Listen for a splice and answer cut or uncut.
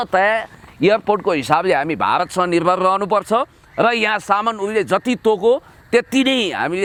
uncut